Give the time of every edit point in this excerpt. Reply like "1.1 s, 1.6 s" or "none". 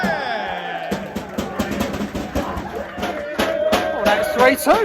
3.1 s